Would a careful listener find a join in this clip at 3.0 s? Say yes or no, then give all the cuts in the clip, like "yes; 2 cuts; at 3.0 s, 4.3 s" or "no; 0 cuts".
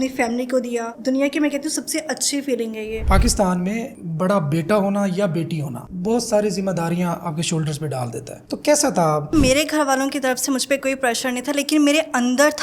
yes; 4 cuts; at 0.9 s, 3.0 s, 8.4 s, 9.3 s